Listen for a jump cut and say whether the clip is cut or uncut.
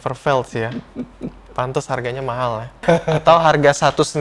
cut